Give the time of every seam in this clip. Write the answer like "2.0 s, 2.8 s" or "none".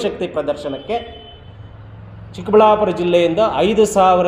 none